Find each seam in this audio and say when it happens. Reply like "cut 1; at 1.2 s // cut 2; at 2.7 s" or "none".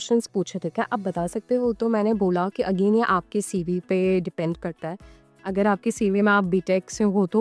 none